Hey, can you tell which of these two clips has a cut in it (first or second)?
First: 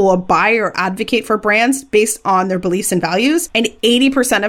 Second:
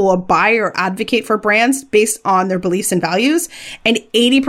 first